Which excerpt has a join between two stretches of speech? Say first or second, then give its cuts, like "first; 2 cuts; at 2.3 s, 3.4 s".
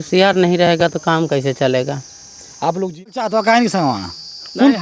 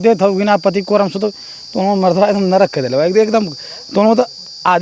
first; 1 cut; at 3.1 s